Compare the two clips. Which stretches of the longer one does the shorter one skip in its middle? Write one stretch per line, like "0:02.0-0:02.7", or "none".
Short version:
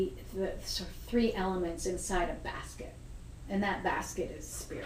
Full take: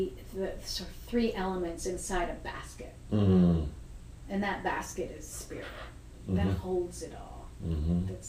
0:03.0-0:03.8